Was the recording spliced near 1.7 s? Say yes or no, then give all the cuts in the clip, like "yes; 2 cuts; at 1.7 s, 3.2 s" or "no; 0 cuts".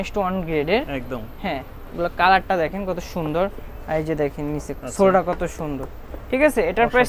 no; 0 cuts